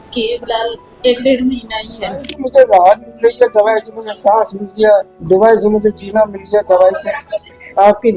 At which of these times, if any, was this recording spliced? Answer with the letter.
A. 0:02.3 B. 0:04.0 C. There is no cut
A